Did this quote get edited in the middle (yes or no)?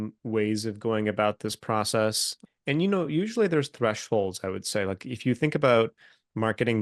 yes